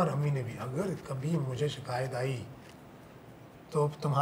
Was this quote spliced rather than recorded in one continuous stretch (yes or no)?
no